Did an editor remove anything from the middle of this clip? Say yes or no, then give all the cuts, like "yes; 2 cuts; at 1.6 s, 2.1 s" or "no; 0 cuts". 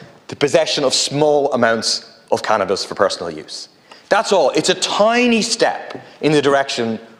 no; 0 cuts